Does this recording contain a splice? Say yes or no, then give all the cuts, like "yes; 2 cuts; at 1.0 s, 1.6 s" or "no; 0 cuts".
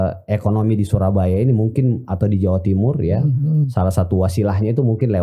no; 0 cuts